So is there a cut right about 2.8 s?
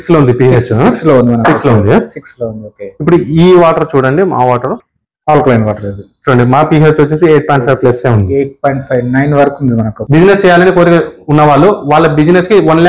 no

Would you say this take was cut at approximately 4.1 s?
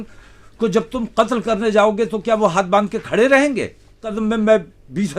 yes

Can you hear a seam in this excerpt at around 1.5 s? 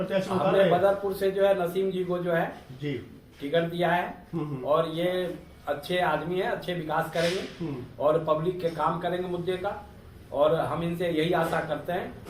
yes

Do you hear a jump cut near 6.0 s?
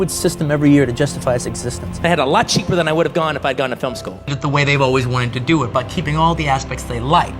no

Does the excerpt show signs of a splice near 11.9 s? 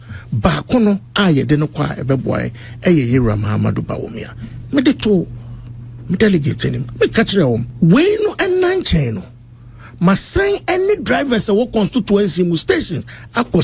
no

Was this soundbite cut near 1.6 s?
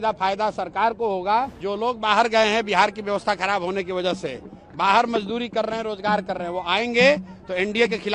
yes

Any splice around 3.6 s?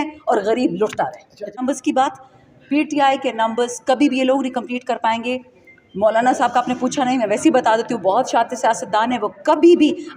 no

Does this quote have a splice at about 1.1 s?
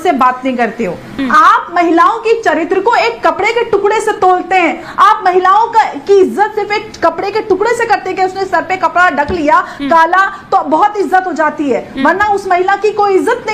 yes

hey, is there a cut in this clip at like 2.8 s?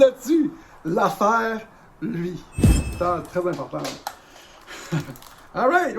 yes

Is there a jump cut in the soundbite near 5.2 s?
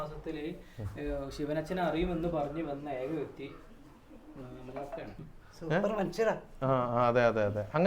yes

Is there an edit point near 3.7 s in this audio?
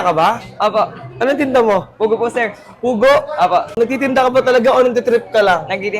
yes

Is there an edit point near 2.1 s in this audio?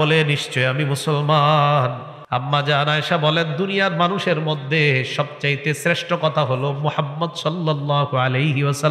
yes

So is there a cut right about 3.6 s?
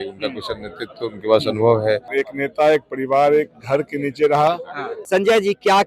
no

